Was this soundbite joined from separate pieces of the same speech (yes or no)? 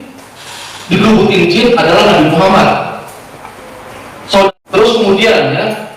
yes